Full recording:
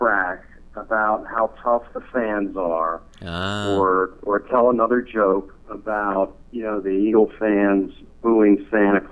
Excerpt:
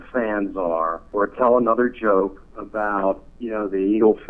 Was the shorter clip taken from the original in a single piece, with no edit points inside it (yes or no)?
no